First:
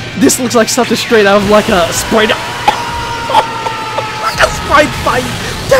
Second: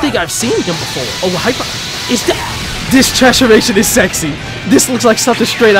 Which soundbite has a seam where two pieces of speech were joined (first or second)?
second